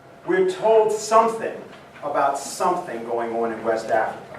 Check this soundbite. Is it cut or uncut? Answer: cut